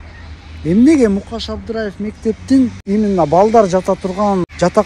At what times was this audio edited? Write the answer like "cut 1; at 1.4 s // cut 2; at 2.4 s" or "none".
cut 1; at 2.8 s